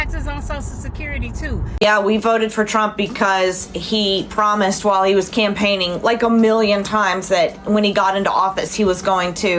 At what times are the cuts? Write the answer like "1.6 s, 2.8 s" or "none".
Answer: 1.7 s